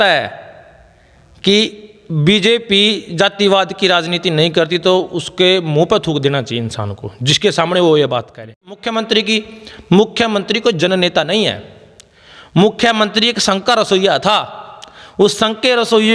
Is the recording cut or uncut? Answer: cut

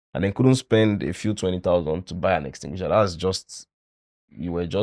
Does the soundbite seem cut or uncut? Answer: uncut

